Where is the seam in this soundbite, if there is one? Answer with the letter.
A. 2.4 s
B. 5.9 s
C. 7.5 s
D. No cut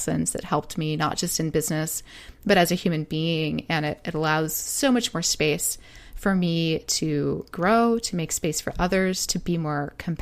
C